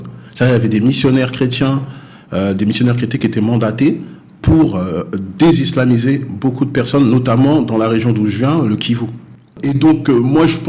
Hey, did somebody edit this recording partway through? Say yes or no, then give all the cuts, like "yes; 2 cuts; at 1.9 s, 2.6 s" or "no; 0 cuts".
yes; 1 cut; at 9.6 s